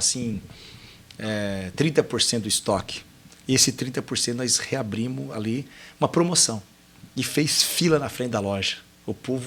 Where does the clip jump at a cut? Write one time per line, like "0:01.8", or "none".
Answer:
none